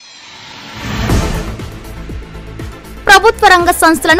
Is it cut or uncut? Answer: cut